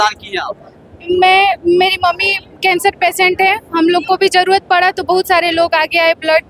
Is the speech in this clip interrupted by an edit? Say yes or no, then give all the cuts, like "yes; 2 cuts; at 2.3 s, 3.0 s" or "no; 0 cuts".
no; 0 cuts